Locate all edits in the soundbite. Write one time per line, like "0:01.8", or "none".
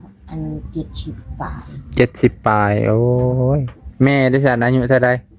none